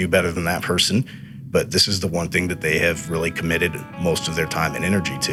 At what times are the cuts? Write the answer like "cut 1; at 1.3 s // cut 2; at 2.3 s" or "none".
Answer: none